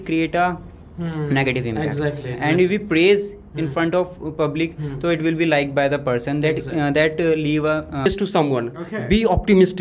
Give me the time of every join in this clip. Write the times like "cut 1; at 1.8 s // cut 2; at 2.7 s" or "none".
cut 1; at 8.1 s